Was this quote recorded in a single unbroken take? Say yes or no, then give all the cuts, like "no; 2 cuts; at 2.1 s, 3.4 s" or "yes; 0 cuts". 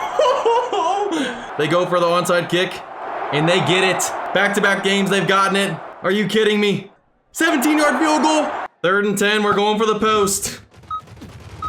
no; 5 cuts; at 1.5 s, 4.1 s, 5.9 s, 6.9 s, 8.6 s